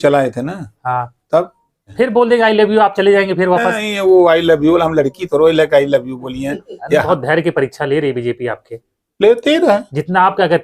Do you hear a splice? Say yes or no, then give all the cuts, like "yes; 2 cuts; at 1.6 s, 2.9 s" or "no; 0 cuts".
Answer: yes; 2 cuts; at 1.9 s, 7.0 s